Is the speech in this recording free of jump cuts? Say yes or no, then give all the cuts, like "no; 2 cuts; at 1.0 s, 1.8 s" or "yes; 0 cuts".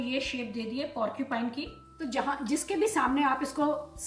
no; 1 cut; at 1.8 s